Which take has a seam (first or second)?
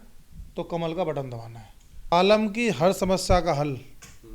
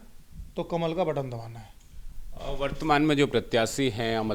first